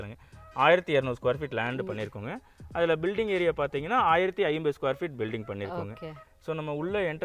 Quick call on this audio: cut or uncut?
uncut